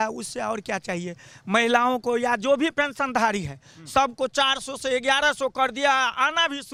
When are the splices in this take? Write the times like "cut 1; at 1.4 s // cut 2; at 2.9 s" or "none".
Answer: none